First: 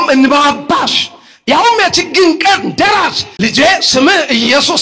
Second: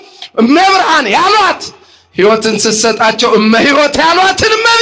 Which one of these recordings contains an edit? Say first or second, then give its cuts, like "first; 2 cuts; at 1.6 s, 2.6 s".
first; 1 cut; at 3.2 s